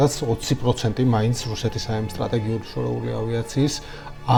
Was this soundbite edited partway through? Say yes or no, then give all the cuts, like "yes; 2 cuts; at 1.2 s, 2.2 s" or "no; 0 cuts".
no; 0 cuts